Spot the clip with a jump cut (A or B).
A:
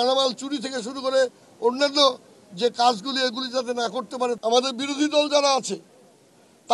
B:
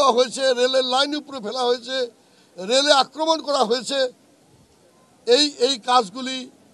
A